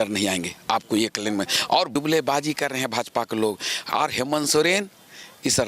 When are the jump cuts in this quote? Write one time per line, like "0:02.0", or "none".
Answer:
0:01.9